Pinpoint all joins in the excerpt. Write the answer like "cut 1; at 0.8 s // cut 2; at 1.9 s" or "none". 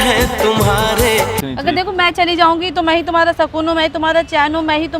cut 1; at 1.4 s

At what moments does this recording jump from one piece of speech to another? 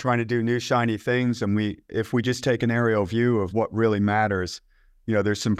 none

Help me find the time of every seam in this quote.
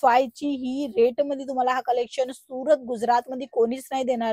none

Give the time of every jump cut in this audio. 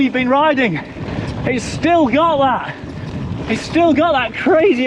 none

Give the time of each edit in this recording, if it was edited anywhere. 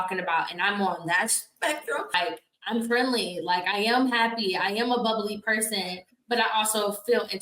cut 1; at 2.1 s

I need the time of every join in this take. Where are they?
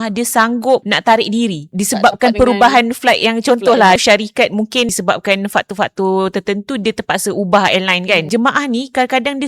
cut 1; at 0.9 s // cut 2; at 1.6 s // cut 3; at 4.0 s // cut 4; at 4.9 s // cut 5; at 8.3 s

